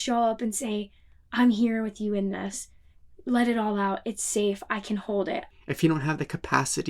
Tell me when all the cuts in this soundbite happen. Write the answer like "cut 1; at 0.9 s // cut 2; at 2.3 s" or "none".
cut 1; at 5.5 s